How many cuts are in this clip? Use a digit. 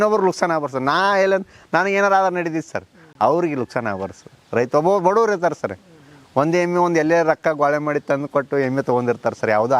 0